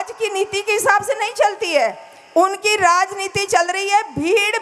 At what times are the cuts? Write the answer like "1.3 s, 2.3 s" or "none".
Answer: none